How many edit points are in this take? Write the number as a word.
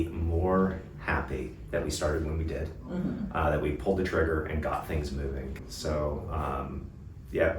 one